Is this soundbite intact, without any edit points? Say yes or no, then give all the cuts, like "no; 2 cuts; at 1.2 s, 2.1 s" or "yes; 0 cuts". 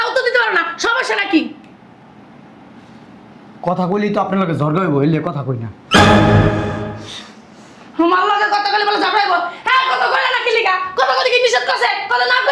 yes; 0 cuts